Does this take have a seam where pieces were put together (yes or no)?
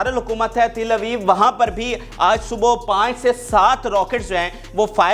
no